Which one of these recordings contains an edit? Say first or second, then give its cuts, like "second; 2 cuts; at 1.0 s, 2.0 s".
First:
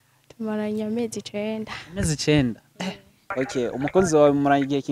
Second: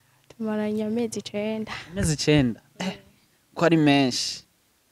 first; 1 cut; at 3.2 s